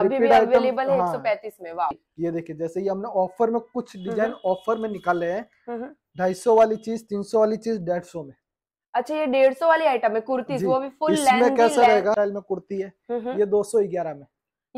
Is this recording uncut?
no; 2 cuts; at 2.0 s, 12.2 s

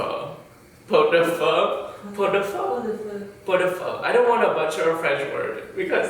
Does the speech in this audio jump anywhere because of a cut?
yes; 1 cut; at 4.0 s

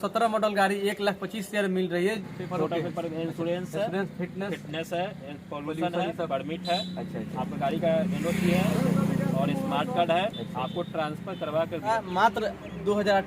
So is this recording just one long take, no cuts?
no; 2 cuts; at 2.2 s, 11.9 s

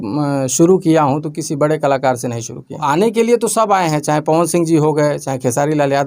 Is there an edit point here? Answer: yes; 1 cut; at 2.8 s

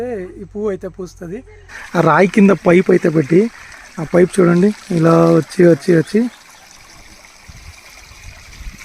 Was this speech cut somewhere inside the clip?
yes; 1 cut; at 1.8 s

